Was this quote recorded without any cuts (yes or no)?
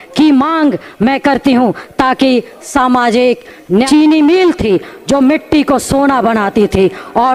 no